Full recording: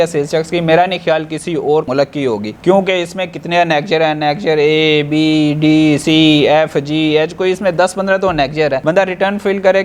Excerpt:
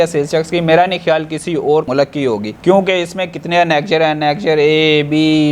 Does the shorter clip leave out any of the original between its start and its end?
no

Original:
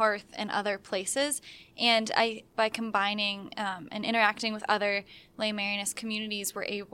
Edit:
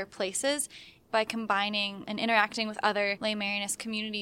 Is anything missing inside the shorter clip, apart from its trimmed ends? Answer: yes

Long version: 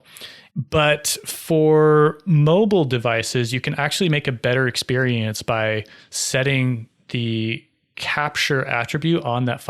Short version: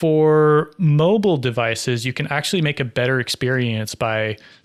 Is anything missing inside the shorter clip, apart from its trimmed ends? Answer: no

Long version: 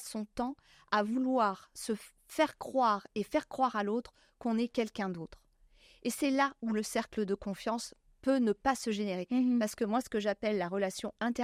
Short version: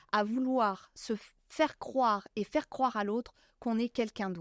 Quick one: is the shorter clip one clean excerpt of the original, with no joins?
yes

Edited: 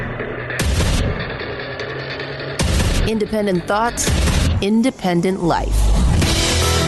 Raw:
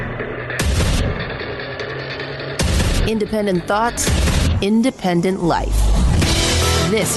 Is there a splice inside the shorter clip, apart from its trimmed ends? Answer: no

